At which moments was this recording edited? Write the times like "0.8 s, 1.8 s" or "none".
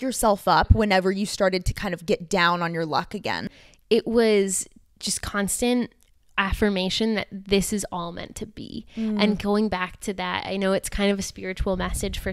3.5 s